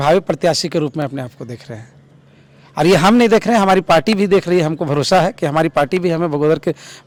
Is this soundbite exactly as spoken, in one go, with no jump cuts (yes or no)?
yes